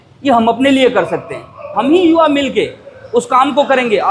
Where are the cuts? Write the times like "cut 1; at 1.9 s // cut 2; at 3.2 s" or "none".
cut 1; at 1.7 s